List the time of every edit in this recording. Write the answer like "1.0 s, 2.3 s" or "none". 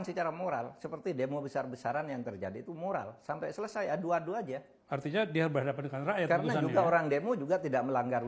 4.7 s